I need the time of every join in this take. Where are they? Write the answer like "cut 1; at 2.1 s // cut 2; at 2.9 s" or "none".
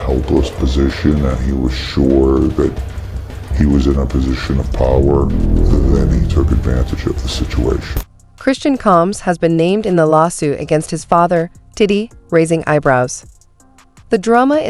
cut 1; at 8.0 s